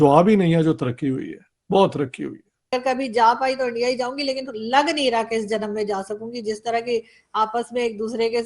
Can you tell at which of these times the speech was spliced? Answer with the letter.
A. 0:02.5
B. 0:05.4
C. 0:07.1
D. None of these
A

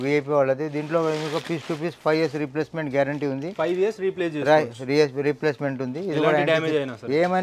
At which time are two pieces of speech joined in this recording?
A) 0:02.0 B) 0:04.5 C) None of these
C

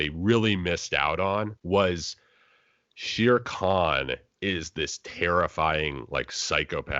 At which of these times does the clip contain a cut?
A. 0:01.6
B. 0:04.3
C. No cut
A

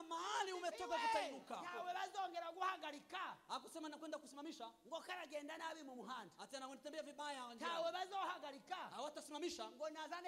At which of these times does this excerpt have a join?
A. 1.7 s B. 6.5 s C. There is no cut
A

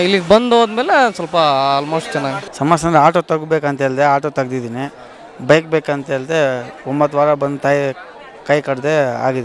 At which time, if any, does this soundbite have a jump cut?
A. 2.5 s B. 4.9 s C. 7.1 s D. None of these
A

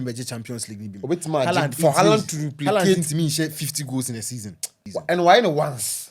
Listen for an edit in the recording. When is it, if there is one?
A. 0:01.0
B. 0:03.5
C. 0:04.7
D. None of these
C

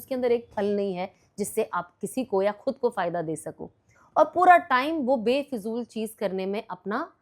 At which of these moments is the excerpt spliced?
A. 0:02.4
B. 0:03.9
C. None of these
B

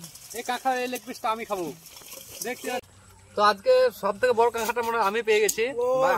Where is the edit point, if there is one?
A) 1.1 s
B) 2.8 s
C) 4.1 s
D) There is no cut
B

